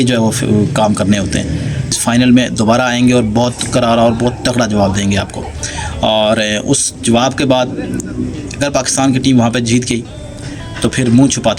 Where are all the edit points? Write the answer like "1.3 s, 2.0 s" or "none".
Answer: 2.0 s